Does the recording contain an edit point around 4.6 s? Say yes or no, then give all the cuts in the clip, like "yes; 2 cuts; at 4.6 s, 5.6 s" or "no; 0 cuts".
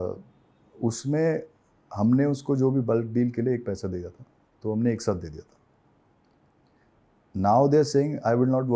no; 0 cuts